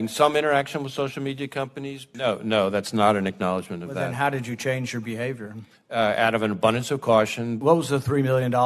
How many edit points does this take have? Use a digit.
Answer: 2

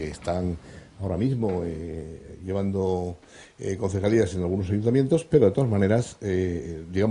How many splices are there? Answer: 1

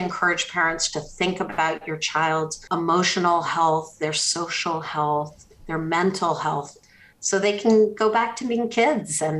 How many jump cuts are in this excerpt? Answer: 2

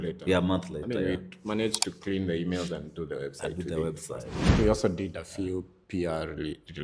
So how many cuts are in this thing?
1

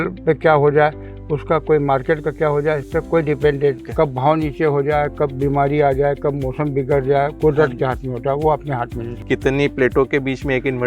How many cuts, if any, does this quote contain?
2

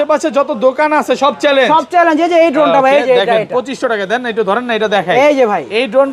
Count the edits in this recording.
0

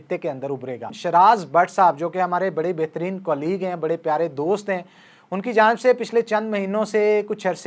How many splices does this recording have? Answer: 1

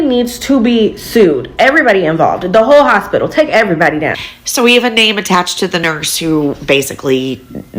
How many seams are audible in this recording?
1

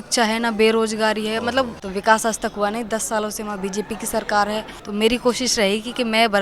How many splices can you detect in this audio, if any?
2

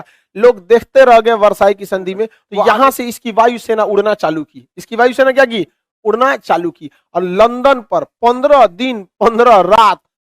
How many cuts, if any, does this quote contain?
1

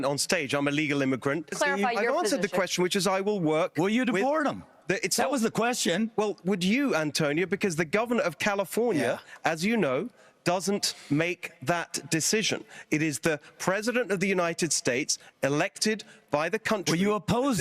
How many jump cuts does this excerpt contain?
1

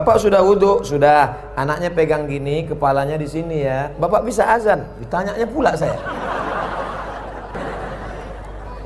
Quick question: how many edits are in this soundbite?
1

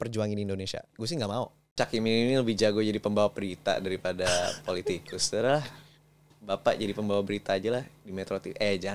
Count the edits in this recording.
1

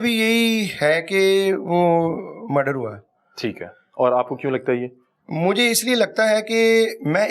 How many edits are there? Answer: 0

